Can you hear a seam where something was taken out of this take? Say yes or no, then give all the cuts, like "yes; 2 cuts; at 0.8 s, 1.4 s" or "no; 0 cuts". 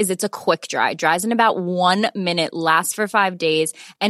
no; 0 cuts